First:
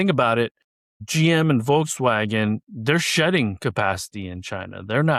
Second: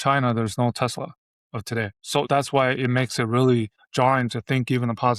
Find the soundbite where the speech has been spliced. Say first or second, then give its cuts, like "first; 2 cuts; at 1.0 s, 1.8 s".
second; 2 cuts; at 2.2 s, 3.8 s